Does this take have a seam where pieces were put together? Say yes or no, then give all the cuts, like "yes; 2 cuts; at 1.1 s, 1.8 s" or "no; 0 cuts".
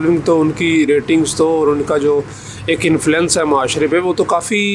no; 0 cuts